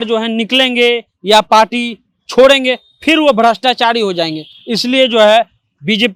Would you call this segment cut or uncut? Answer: uncut